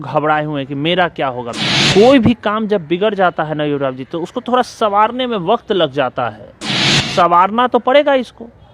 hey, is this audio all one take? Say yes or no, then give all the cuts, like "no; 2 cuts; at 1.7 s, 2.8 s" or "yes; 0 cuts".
no; 2 cuts; at 1.5 s, 6.7 s